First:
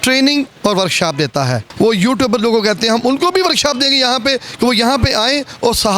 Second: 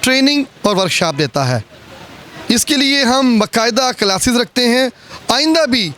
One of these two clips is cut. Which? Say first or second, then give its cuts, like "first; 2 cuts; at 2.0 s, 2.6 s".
first; 1 cut; at 1.6 s